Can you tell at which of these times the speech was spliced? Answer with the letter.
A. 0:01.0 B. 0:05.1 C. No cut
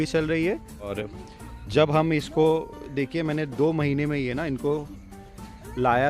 A